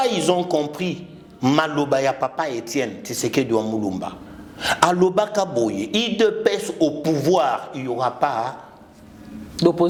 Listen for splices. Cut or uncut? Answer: uncut